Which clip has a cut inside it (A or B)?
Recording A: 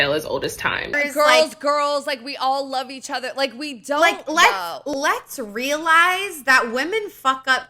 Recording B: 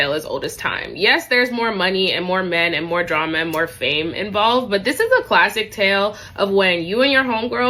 A